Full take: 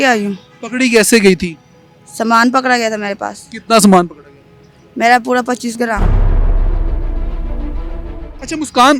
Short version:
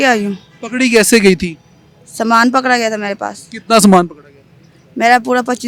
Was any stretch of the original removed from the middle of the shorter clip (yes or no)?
no